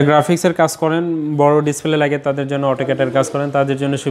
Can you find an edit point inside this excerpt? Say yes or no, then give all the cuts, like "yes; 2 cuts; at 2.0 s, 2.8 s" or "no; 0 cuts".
no; 0 cuts